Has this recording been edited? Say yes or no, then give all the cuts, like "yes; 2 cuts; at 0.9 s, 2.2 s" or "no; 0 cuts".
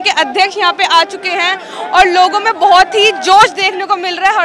no; 0 cuts